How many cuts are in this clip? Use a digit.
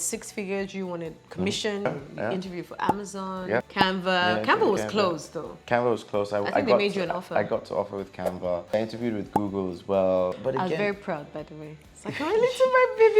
3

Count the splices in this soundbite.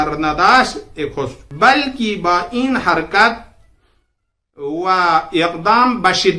1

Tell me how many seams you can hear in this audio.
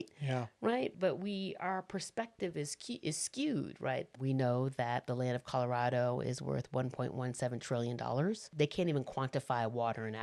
3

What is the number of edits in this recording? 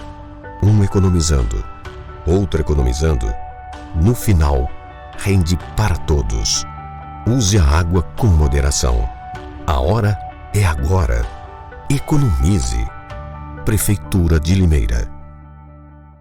0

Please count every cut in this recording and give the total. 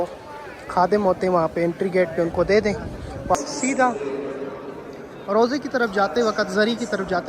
1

